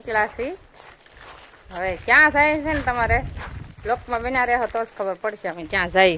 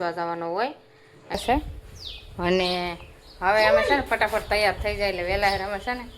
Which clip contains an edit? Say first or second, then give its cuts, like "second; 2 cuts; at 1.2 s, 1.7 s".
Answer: second; 1 cut; at 1.4 s